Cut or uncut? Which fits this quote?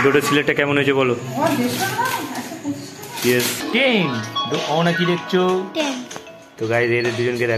cut